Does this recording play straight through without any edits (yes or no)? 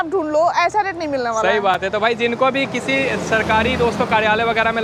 yes